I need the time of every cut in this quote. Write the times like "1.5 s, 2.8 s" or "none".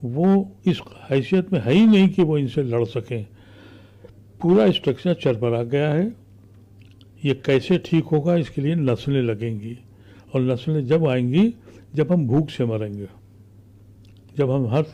none